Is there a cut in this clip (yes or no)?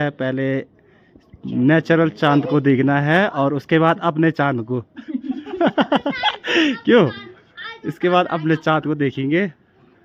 no